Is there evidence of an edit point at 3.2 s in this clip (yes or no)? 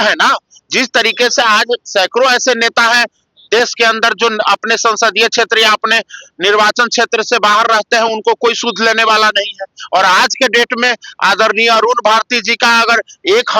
no